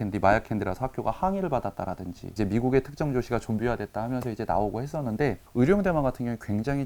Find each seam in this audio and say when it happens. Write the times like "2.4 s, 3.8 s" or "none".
2.3 s, 5.4 s